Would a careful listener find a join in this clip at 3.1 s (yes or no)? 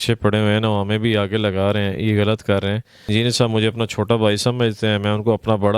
yes